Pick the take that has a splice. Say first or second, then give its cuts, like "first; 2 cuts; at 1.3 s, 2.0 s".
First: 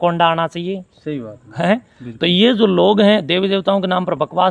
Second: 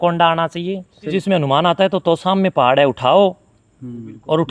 second; 1 cut; at 1.1 s